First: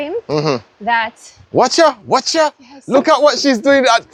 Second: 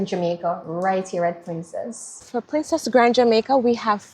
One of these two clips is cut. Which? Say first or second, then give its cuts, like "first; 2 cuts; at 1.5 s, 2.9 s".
second; 1 cut; at 2.3 s